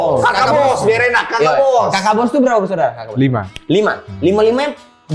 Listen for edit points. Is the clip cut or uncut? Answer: uncut